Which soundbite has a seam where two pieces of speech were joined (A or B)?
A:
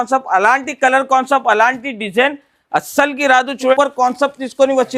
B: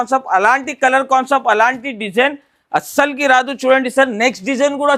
A